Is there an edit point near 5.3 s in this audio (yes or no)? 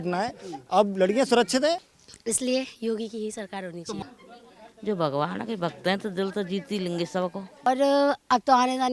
no